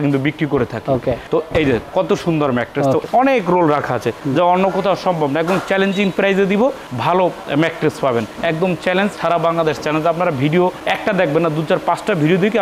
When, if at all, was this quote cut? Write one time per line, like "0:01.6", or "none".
0:03.0